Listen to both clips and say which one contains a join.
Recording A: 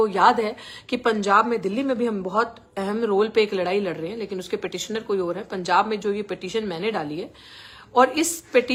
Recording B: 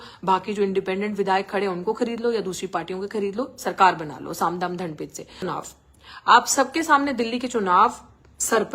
B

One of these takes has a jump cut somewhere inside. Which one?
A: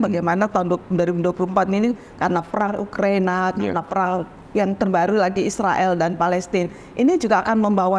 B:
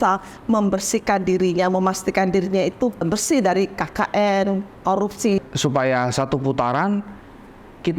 B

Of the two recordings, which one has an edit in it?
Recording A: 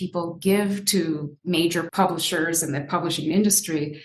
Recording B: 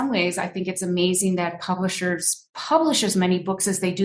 A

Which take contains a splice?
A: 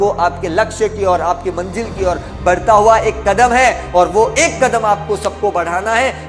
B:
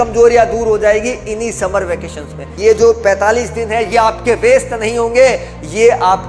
B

